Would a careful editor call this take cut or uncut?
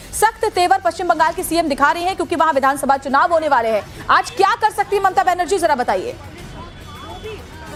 uncut